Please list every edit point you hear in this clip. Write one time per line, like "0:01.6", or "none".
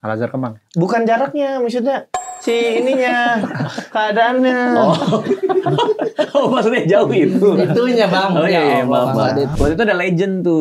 0:09.5